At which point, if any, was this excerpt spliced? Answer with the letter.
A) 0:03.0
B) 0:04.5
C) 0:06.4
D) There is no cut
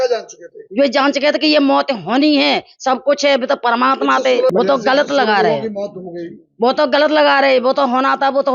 B